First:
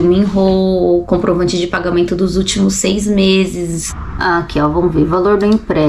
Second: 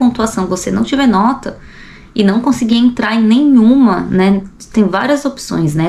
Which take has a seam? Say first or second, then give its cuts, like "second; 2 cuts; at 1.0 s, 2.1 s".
first; 1 cut; at 3.9 s